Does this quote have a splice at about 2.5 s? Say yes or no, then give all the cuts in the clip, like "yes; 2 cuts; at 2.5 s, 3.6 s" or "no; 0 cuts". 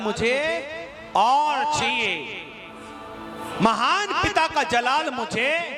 no; 0 cuts